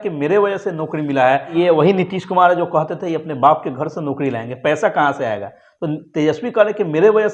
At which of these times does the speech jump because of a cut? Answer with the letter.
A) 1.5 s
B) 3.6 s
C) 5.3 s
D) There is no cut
A